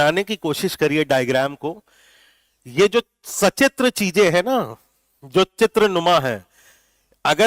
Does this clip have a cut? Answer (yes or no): no